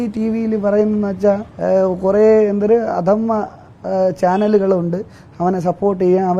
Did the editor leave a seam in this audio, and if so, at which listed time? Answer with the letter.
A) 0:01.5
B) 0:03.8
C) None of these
A